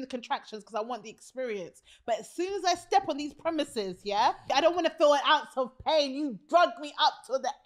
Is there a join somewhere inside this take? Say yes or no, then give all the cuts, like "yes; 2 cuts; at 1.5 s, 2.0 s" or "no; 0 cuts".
yes; 1 cut; at 4.5 s